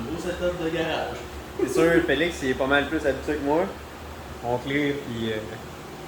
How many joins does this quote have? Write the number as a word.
one